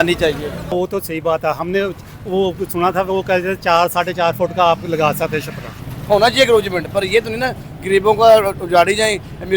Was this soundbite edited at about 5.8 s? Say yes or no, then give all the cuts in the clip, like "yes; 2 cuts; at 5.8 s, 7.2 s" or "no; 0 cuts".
yes; 2 cuts; at 0.7 s, 5.8 s